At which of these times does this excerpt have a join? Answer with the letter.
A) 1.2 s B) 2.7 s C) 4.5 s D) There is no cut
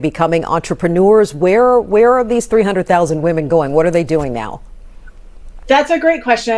C